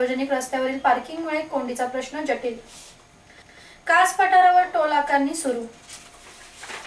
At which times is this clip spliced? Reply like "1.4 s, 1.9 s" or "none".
none